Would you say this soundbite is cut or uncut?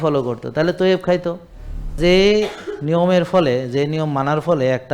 cut